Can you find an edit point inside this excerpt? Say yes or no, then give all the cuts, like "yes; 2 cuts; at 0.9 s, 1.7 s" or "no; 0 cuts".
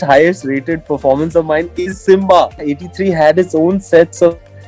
yes; 1 cut; at 2.6 s